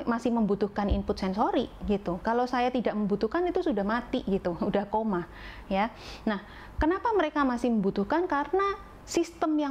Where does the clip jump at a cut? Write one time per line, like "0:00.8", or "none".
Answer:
none